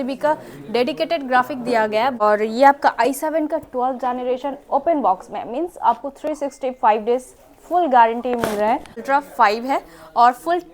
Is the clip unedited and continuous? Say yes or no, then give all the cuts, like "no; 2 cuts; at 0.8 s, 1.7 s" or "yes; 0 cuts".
no; 2 cuts; at 2.2 s, 9.0 s